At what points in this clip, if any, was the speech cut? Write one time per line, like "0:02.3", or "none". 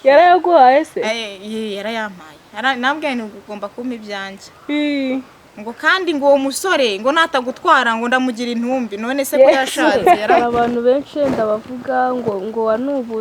0:10.4